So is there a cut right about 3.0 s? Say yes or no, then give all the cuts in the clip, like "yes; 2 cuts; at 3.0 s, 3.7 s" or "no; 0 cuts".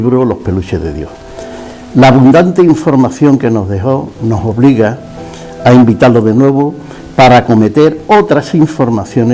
yes; 1 cut; at 3.0 s